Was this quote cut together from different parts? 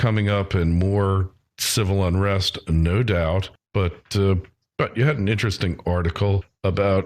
yes; 1 cut; at 2.6 s

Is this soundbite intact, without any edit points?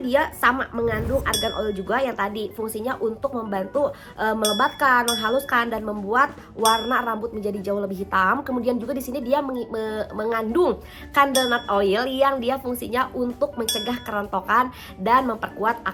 yes; 0 cuts

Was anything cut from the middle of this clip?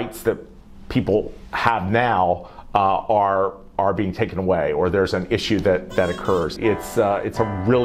yes; 1 cut; at 6.5 s

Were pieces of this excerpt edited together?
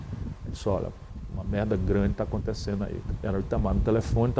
yes; 1 cut; at 3.0 s

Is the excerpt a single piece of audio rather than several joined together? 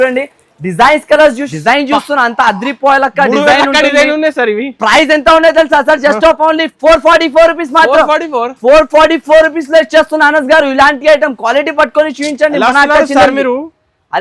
no; 1 cut; at 1.5 s

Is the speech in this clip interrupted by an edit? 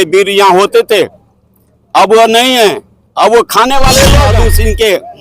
yes; 1 cut; at 4.3 s

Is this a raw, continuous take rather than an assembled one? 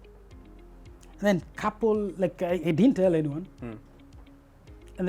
no; 1 cut; at 1.1 s

